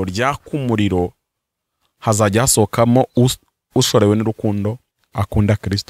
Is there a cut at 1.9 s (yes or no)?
no